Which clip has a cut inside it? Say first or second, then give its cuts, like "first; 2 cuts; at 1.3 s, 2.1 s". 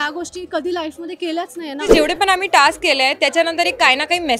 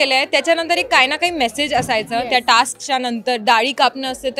first; 1 cut; at 1.9 s